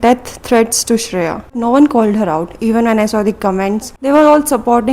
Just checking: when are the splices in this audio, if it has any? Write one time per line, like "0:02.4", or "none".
0:01.5
0:03.9